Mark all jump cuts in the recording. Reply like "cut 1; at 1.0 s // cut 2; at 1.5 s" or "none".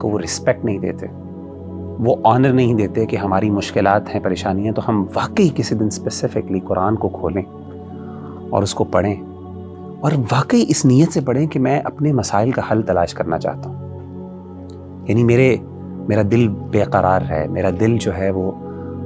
none